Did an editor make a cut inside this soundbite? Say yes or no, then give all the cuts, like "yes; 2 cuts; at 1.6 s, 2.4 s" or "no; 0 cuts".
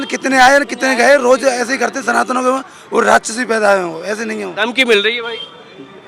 no; 0 cuts